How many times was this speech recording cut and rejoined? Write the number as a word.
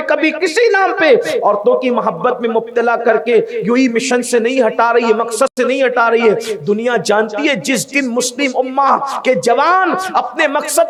zero